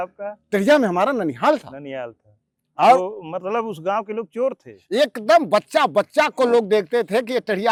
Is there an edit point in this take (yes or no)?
no